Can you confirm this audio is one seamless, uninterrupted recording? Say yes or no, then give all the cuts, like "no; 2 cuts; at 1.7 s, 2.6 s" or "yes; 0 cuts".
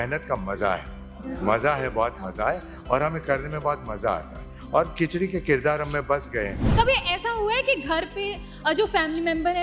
no; 1 cut; at 6.6 s